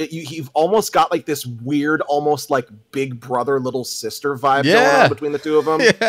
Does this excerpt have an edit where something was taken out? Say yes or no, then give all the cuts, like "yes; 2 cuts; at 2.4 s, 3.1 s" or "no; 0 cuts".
no; 0 cuts